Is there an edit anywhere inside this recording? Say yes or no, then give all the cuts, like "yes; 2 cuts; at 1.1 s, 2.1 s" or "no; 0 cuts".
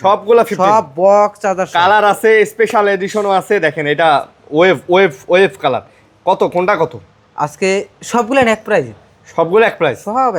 no; 0 cuts